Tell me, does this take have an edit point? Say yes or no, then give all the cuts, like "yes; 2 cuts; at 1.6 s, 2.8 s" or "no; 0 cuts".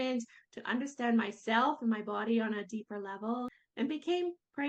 yes; 1 cut; at 3.5 s